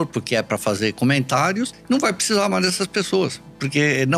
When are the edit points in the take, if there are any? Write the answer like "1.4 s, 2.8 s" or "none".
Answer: 1.8 s